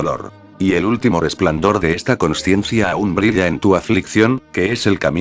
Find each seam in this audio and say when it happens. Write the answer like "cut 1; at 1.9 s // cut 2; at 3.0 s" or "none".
cut 1; at 4.0 s

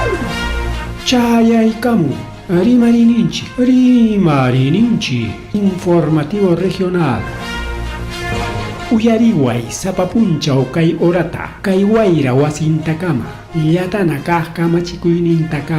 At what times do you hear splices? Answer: none

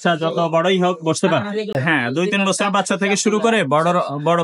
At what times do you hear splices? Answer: cut 1; at 1.8 s

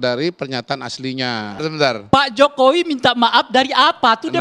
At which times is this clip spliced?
cut 1; at 1.6 s

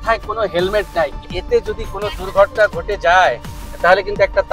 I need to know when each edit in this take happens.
cut 1; at 1.3 s

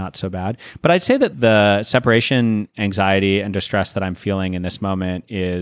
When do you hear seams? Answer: cut 1; at 1.3 s

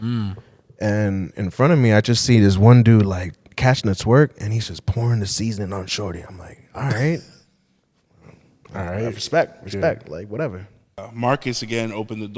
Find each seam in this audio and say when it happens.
cut 1; at 11.0 s

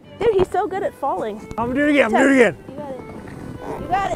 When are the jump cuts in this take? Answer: cut 1; at 1.5 s

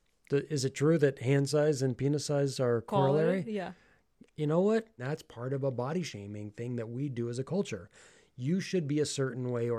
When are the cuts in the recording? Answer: cut 1; at 2.8 s // cut 2; at 5.0 s

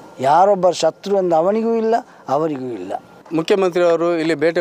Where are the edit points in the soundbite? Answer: cut 1; at 3.2 s

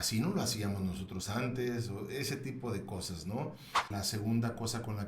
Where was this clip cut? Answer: cut 1; at 3.9 s

